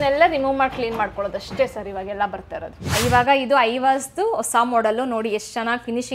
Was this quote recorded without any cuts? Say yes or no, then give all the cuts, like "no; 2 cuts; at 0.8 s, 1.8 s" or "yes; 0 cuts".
no; 1 cut; at 2.8 s